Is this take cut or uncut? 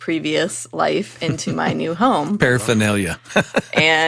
uncut